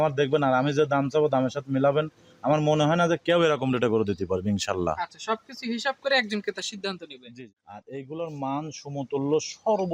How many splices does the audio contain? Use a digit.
2